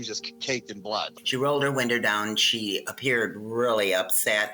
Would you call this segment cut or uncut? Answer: cut